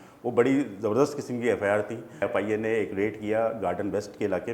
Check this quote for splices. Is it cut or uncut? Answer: cut